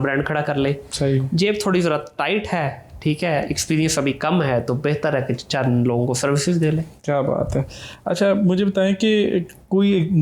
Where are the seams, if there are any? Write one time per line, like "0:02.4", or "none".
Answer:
none